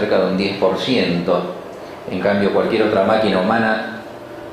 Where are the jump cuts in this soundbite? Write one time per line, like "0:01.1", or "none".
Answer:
0:01.8